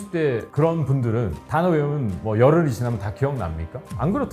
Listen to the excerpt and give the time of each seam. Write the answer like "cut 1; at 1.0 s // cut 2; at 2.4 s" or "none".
none